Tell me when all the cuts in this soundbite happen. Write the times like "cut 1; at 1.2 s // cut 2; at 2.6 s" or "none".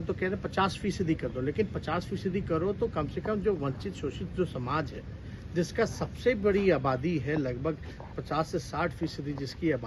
none